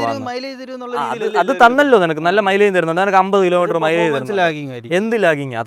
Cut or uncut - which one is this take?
uncut